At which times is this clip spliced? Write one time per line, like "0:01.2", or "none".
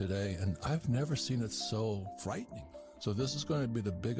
0:02.5